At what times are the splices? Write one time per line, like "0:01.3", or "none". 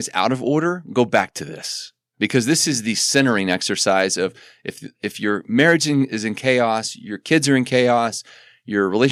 none